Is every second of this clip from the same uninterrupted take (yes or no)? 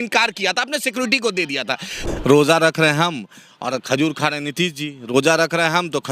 no